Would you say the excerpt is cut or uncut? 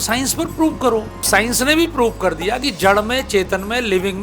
cut